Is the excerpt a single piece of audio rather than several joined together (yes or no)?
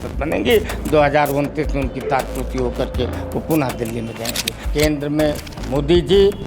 no